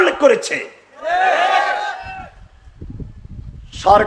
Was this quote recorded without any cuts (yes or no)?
yes